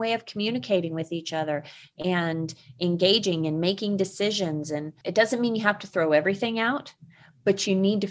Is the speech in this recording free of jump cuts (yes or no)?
no